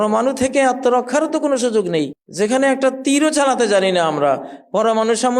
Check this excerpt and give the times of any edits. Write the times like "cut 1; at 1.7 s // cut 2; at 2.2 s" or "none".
cut 1; at 2.2 s